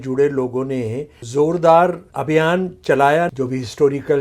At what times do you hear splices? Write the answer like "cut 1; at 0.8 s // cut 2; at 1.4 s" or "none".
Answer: cut 1; at 1.2 s // cut 2; at 2.1 s // cut 3; at 3.3 s